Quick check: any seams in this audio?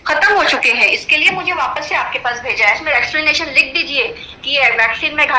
yes; 1 cut; at 2.8 s

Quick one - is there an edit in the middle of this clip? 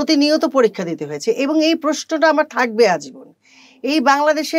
no; 0 cuts

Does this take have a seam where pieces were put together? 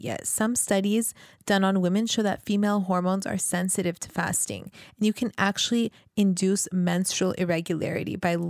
no; 0 cuts

